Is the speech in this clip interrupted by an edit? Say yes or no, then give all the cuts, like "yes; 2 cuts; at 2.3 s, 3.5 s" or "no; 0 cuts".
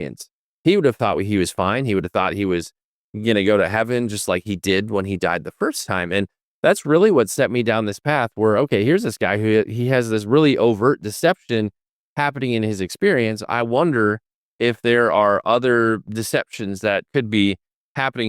yes; 1 cut; at 17.1 s